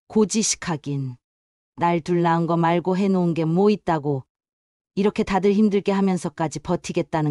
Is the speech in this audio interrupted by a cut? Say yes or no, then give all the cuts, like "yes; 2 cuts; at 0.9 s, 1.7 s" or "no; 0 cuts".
no; 0 cuts